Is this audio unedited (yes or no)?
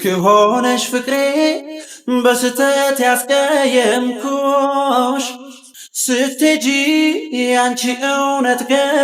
yes